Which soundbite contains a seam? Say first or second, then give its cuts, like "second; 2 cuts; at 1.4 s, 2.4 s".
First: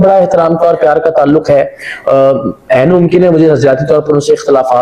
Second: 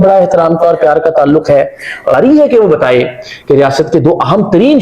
second; 1 cut; at 2.1 s